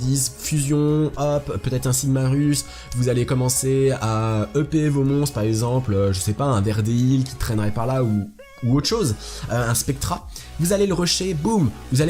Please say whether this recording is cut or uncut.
uncut